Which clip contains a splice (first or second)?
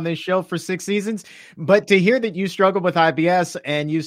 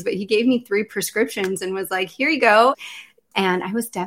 second